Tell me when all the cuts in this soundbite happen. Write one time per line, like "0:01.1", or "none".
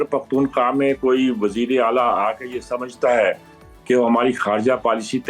none